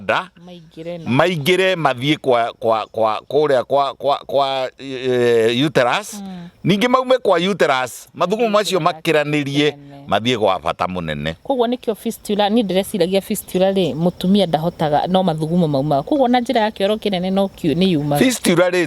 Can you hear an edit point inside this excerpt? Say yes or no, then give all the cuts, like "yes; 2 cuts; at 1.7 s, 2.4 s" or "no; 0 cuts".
no; 0 cuts